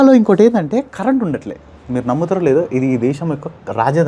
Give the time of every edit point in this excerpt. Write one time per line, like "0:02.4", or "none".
none